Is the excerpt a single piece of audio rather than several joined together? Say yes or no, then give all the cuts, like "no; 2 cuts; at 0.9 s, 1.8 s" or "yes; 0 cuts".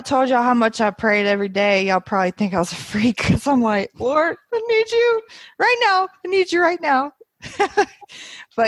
yes; 0 cuts